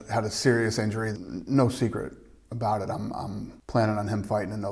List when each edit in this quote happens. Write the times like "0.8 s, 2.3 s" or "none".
1.1 s, 3.5 s